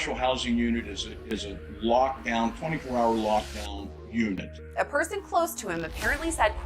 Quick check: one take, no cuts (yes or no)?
no